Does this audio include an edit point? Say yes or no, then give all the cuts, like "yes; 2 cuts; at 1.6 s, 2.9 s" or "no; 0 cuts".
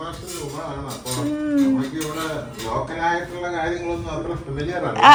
no; 0 cuts